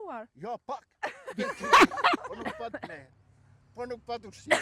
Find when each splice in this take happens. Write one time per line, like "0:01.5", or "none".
0:02.3